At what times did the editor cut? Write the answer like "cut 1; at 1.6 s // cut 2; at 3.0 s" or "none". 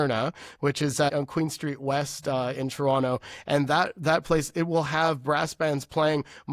cut 1; at 1.1 s